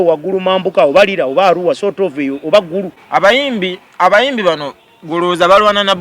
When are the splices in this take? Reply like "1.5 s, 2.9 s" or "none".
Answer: 3.0 s